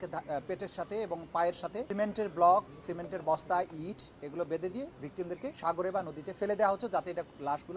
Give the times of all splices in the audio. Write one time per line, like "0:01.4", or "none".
0:01.9
0:02.8
0:05.6